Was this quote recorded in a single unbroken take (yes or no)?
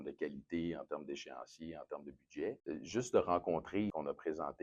no